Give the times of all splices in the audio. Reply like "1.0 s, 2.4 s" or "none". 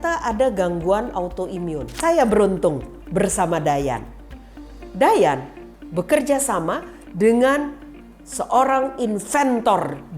1.9 s